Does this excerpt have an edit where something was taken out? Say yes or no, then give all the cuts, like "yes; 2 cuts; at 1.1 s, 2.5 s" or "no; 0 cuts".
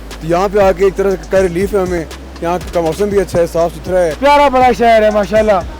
yes; 1 cut; at 4.2 s